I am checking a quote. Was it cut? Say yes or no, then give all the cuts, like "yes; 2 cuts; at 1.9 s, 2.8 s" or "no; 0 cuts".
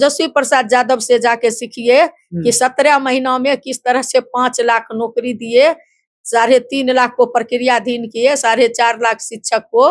no; 0 cuts